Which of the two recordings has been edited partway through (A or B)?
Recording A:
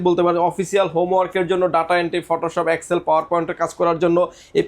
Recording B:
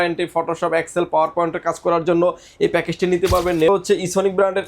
B